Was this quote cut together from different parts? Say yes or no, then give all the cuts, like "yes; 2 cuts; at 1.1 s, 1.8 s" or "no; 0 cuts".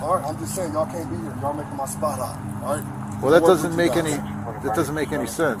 no; 0 cuts